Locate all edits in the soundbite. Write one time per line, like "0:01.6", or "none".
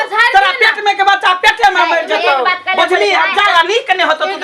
0:03.5